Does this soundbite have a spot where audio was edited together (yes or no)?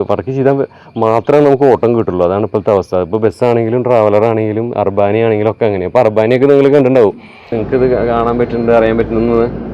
yes